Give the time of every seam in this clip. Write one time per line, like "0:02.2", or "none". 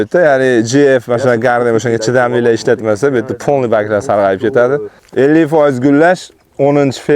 0:05.0